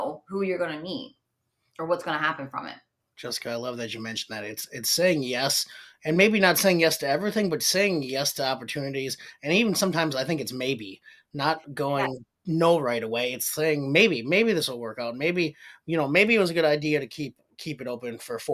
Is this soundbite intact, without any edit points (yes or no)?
yes